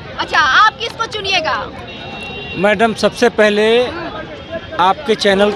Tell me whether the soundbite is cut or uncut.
uncut